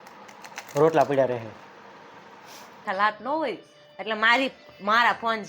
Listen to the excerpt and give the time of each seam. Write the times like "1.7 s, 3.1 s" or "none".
2.8 s